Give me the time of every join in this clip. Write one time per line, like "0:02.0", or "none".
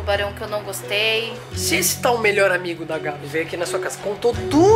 0:01.5
0:03.2